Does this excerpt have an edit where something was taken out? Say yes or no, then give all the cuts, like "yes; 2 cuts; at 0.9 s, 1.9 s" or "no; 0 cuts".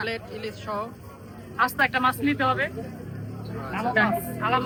no; 0 cuts